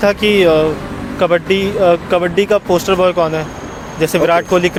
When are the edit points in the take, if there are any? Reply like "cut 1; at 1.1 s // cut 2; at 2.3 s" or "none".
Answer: none

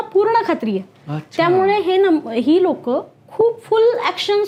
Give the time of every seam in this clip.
none

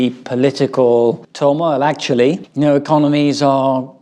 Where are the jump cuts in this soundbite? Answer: none

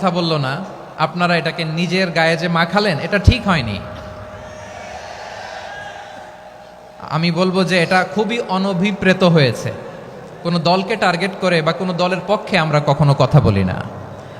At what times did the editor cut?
none

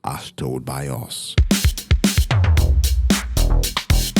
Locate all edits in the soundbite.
cut 1; at 1.2 s

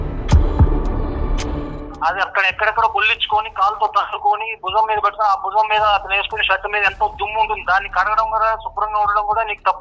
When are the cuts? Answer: cut 1; at 1.9 s

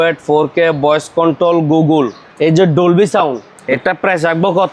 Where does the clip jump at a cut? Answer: cut 1; at 2.2 s // cut 2; at 3.5 s

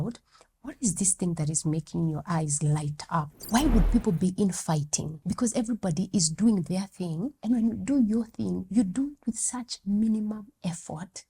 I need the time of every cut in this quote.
cut 1; at 3.4 s // cut 2; at 5.1 s // cut 3; at 7.3 s

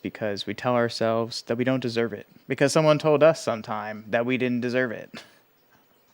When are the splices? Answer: cut 1; at 2.3 s

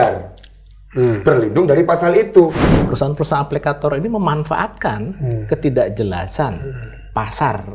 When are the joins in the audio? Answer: cut 1; at 2.8 s

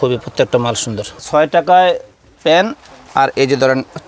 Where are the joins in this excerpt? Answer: cut 1; at 1.2 s

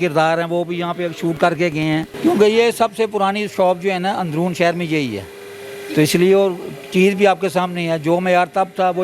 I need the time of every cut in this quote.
none

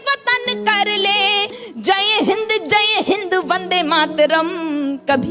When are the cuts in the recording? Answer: cut 1; at 1.5 s

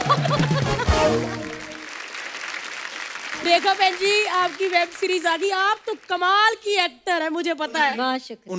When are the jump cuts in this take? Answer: none

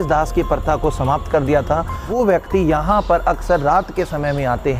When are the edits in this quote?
cut 1; at 2.0 s

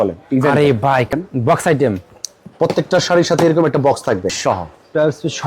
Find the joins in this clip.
cut 1; at 1.1 s // cut 2; at 4.3 s

